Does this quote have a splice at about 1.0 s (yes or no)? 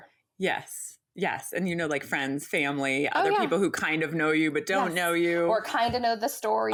no